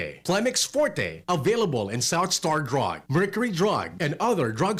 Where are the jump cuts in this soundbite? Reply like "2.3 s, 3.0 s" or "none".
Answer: none